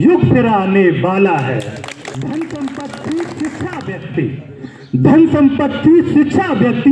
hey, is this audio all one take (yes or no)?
no